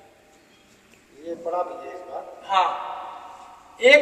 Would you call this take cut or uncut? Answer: uncut